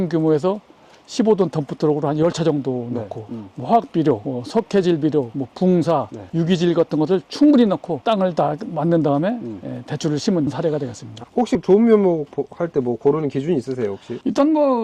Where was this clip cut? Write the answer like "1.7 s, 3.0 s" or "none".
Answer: 11.3 s